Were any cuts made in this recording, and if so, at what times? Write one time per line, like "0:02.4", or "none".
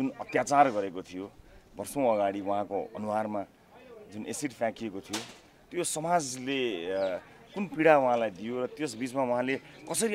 none